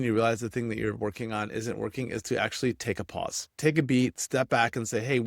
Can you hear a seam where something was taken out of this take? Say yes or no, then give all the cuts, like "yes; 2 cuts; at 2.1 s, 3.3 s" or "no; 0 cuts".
yes; 1 cut; at 4.2 s